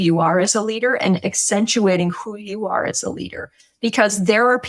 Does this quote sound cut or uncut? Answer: uncut